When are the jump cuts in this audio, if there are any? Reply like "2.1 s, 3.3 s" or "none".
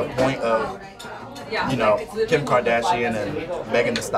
3.3 s